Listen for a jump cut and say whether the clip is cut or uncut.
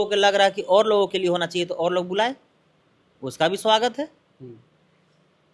uncut